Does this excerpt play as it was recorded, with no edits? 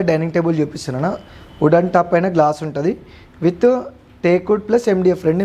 yes; 0 cuts

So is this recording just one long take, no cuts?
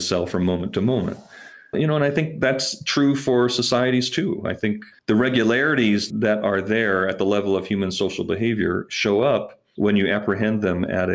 no; 3 cuts; at 4.9 s, 6.1 s, 9.6 s

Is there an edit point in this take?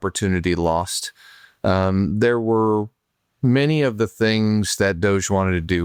no; 0 cuts

